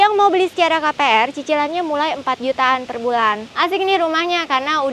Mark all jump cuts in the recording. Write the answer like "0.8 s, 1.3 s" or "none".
3.5 s